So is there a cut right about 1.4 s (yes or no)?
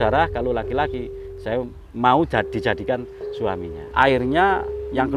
no